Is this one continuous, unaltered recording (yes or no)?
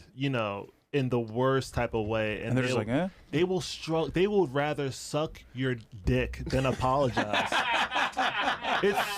yes